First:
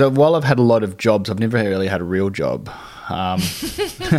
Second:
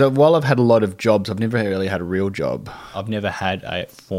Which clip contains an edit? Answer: second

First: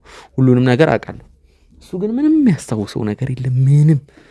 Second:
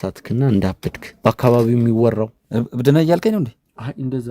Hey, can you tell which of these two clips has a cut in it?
second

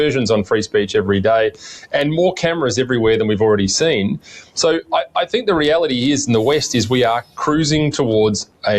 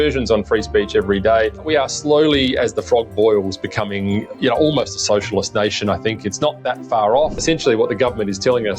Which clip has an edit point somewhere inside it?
second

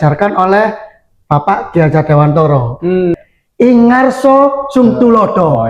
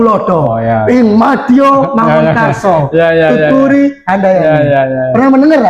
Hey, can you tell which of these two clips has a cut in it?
first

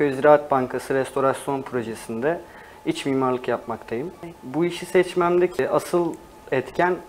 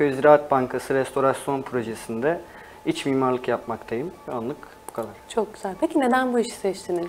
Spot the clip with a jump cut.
first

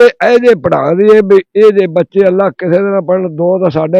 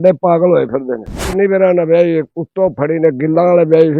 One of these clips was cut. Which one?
second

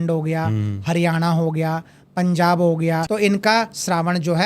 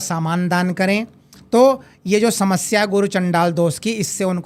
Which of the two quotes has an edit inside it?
first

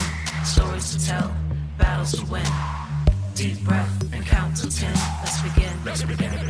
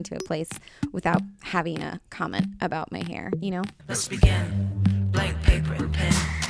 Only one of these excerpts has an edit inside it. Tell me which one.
second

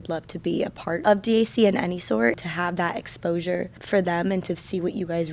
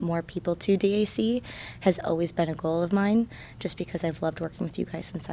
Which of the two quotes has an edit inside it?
first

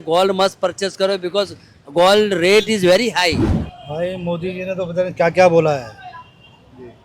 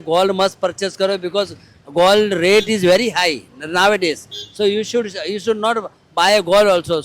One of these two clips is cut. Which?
first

